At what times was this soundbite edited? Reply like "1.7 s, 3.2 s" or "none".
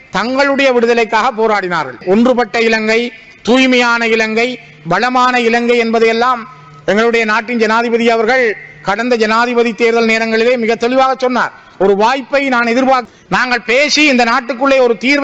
2.0 s, 13.1 s